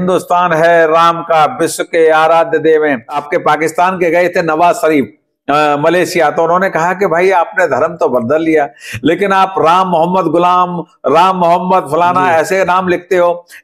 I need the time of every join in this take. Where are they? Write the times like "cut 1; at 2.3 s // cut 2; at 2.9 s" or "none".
cut 1; at 3.2 s